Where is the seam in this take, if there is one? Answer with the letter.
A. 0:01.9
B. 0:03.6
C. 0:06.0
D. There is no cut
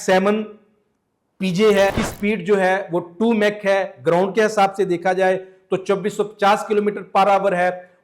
A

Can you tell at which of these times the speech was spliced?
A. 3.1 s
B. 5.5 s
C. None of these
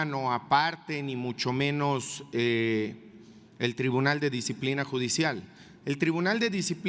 C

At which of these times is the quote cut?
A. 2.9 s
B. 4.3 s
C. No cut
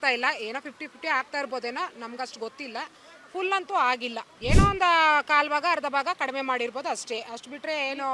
B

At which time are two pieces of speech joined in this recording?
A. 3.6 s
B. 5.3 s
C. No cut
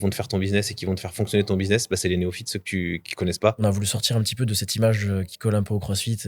A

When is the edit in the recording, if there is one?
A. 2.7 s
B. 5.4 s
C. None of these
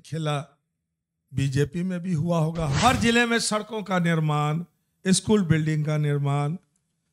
A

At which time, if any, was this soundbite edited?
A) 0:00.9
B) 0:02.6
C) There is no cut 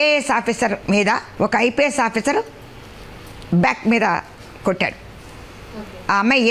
A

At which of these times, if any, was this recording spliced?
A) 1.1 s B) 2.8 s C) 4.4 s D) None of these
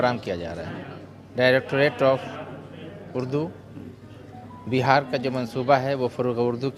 D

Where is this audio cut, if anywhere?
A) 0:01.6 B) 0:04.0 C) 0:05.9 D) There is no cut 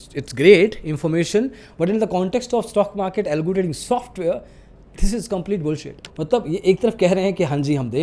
C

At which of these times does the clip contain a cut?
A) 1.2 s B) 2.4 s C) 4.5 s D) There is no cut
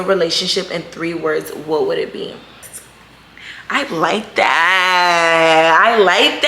B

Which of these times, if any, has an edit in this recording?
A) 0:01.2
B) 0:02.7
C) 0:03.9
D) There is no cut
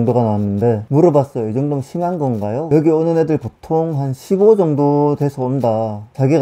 B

